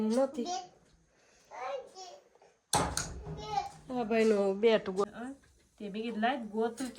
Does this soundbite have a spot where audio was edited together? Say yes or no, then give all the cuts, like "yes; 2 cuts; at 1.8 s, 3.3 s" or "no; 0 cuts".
yes; 1 cut; at 5.0 s